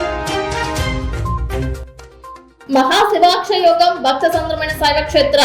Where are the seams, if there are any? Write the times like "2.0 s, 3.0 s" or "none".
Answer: 1.1 s